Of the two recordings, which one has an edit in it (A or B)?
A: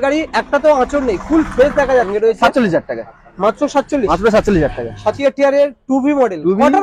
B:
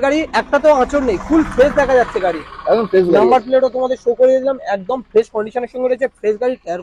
A